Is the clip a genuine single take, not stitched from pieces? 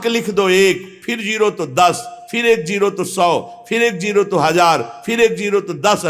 yes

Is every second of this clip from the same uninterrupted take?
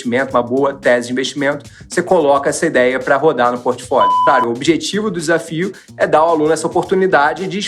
no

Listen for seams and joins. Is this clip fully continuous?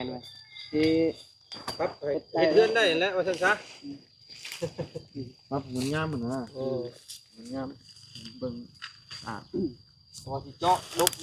yes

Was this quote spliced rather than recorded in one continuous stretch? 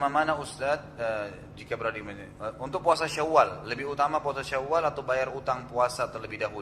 no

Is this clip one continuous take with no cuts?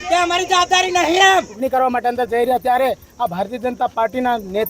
no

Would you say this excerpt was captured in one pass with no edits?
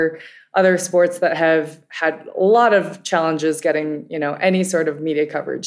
yes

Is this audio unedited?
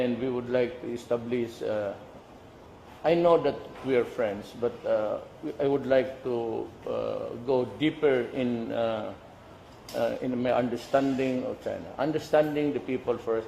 no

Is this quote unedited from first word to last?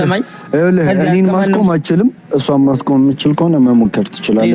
yes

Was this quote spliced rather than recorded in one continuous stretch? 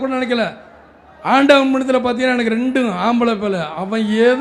no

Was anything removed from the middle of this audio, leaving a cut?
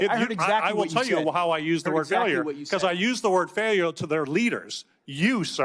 no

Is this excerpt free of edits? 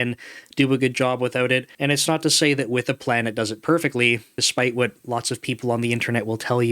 no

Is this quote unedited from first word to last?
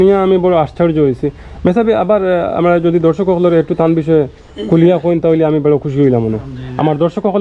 yes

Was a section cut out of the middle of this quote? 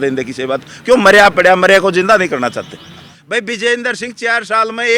yes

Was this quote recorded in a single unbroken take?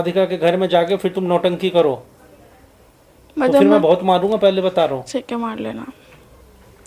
yes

